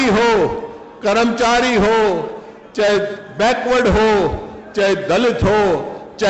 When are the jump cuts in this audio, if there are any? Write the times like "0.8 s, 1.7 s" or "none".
none